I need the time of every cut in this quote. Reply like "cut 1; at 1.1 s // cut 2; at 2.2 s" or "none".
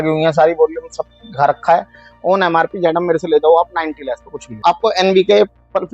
cut 1; at 4.6 s